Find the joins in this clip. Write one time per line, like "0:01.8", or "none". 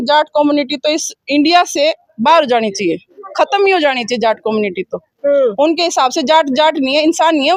none